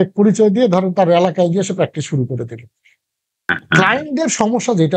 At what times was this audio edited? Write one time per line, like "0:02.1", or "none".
none